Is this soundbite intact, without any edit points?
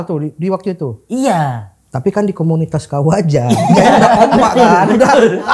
yes; 0 cuts

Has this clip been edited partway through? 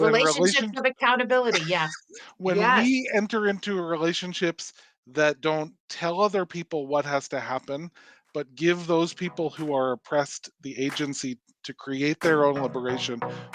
no; 0 cuts

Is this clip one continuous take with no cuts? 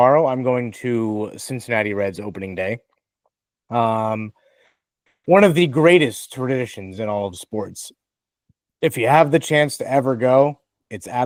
yes; 0 cuts

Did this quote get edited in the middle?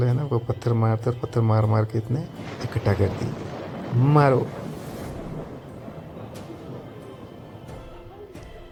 no; 0 cuts

